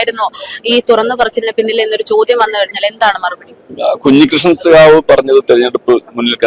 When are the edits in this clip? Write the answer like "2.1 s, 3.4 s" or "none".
none